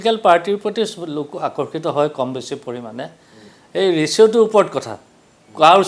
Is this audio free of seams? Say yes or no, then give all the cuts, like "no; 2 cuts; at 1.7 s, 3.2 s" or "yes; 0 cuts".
yes; 0 cuts